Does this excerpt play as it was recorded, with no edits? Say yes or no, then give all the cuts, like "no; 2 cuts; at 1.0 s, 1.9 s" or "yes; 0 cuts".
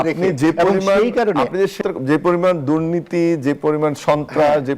no; 1 cut; at 1.8 s